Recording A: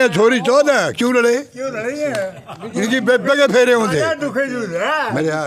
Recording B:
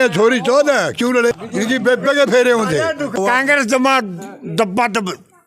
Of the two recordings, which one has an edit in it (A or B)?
B